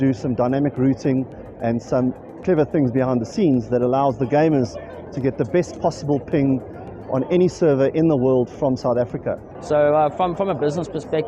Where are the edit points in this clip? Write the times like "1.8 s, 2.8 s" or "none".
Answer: 9.5 s